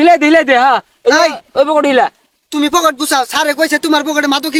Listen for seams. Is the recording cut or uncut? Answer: uncut